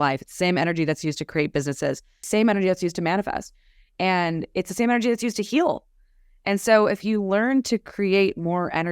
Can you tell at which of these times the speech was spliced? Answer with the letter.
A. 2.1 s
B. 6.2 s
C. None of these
A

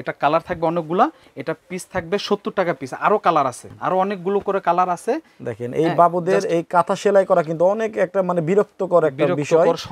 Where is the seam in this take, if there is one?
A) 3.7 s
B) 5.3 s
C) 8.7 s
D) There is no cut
A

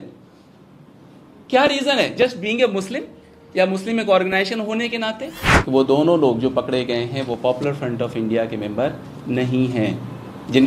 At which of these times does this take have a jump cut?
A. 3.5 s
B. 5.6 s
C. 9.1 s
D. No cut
B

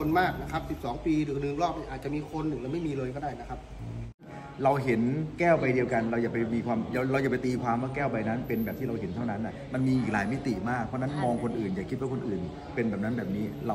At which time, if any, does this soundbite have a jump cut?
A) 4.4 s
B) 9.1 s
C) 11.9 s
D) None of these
A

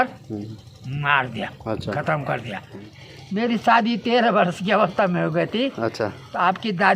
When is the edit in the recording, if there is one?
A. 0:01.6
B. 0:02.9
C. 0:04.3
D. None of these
B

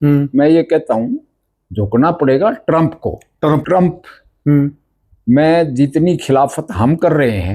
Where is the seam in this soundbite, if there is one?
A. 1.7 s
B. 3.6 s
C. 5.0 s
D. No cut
B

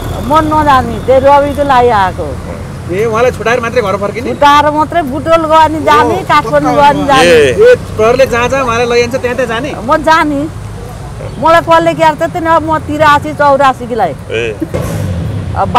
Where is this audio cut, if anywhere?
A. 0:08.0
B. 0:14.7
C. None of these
B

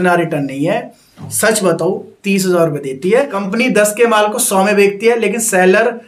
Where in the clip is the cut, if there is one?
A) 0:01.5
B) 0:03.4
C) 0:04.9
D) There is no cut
B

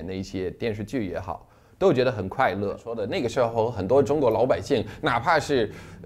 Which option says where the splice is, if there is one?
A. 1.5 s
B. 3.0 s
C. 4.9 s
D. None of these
B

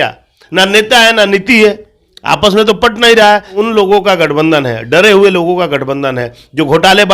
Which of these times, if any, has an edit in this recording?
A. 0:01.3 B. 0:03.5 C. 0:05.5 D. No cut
B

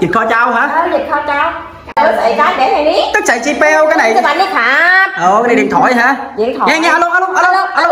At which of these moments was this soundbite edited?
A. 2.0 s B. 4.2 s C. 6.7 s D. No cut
A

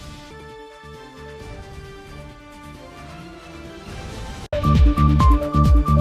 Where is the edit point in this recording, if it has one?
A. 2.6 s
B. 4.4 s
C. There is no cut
B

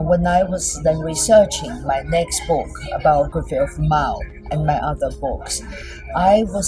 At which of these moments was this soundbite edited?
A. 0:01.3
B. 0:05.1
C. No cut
C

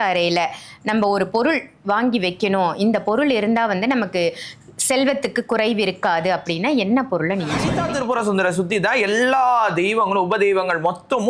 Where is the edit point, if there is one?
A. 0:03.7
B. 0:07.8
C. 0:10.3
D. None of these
B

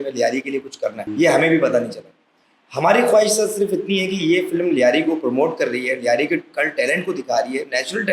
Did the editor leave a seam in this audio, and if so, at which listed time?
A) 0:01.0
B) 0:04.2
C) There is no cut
A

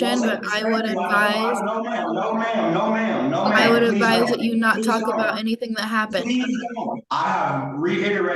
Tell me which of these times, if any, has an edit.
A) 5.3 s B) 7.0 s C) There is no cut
B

